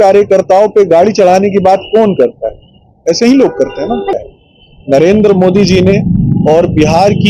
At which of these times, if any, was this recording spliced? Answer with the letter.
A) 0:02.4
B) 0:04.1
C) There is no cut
B